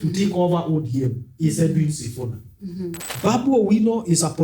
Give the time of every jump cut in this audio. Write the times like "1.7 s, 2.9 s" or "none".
3.0 s